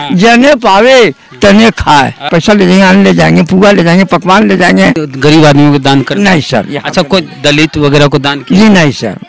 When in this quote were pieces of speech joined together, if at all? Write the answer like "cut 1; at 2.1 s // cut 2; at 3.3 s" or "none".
cut 1; at 2.3 s // cut 2; at 5.0 s